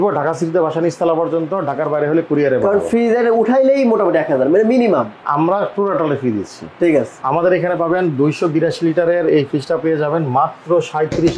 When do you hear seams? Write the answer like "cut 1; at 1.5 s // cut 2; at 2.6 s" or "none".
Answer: none